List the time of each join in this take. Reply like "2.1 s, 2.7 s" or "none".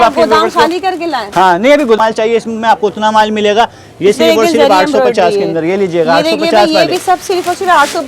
2.0 s